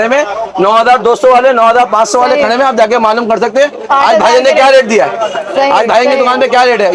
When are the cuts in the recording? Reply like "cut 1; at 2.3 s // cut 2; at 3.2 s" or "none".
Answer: none